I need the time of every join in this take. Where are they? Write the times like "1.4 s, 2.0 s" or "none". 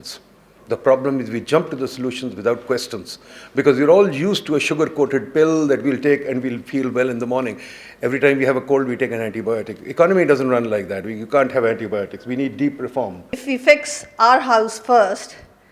13.4 s